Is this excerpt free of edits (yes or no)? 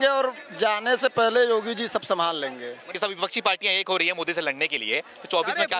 no